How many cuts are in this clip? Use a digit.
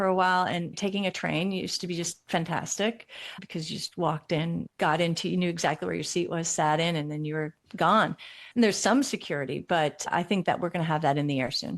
1